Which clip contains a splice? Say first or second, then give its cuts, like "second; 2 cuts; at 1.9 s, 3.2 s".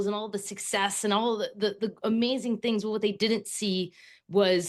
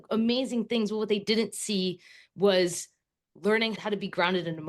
second; 1 cut; at 3.8 s